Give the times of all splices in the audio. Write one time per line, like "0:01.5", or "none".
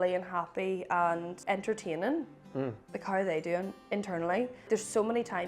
0:01.3
0:02.9
0:04.7